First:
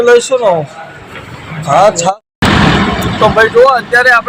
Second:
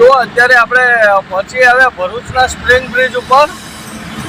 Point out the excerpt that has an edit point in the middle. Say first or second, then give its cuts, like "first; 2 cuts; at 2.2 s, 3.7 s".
first; 1 cut; at 2.1 s